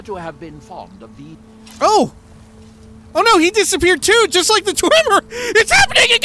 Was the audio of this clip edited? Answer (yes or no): yes